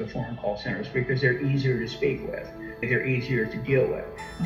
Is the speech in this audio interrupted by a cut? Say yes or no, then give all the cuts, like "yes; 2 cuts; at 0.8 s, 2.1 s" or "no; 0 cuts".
no; 0 cuts